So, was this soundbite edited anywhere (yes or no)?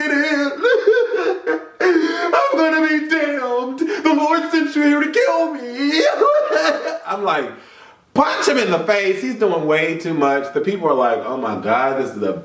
no